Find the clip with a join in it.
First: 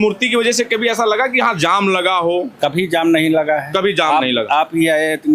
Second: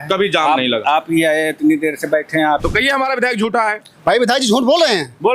second; 1 cut; at 2.6 s

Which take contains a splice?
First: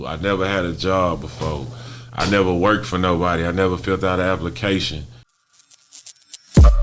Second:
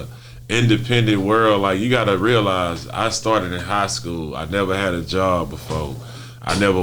first; 1 cut; at 5.4 s

